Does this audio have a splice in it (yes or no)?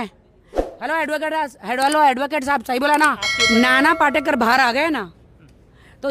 yes